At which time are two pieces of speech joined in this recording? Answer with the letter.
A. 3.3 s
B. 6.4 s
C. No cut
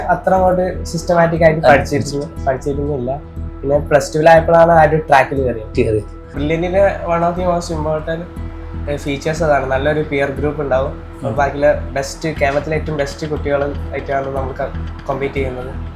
B